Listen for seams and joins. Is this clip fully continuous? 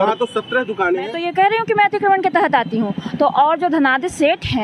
no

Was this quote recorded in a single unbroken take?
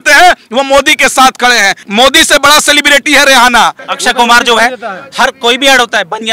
no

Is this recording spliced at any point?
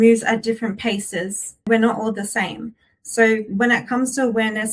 yes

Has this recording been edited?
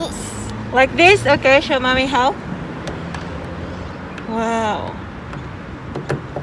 no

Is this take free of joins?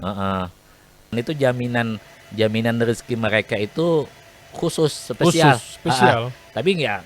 no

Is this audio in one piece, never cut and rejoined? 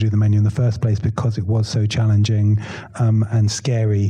yes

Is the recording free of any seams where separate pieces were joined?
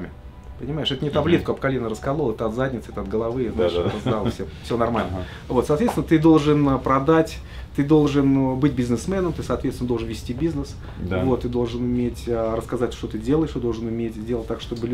yes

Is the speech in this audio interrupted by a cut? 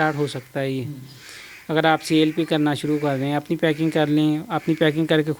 no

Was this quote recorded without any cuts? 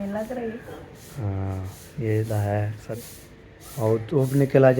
no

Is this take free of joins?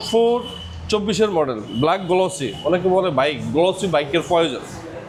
yes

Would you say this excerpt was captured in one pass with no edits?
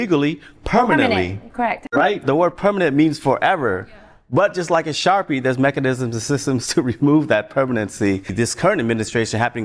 no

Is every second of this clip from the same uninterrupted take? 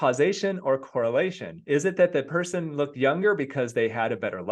yes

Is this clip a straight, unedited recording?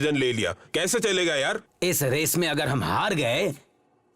no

